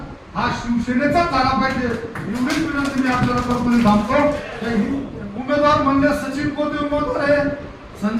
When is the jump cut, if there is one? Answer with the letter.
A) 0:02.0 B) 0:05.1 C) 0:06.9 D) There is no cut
B